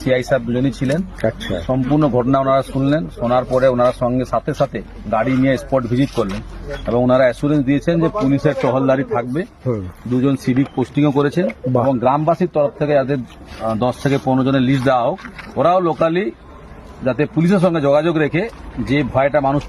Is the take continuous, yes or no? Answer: yes